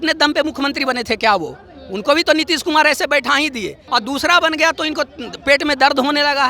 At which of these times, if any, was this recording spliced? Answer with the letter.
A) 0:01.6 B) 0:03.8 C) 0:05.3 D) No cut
B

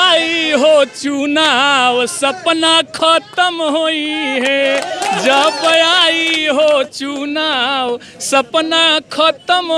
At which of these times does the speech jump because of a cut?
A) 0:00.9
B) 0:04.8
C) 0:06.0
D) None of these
D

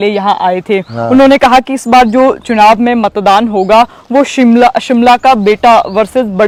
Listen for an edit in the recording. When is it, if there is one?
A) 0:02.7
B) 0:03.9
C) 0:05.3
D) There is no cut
D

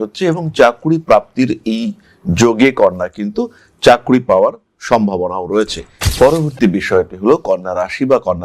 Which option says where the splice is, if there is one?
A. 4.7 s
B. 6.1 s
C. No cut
B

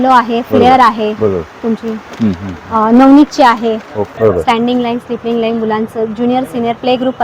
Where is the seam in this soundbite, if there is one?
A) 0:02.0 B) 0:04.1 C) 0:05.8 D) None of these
B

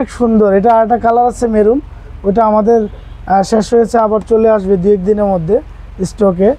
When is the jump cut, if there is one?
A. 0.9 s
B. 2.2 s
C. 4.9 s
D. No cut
D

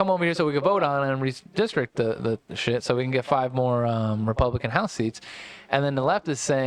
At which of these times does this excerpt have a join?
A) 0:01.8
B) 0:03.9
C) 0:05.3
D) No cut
D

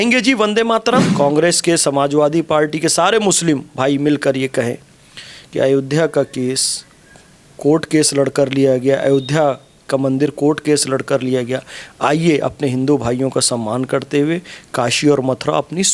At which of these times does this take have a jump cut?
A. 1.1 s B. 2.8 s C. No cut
A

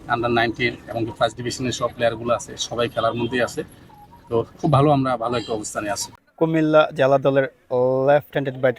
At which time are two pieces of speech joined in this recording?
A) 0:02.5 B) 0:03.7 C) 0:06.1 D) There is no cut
C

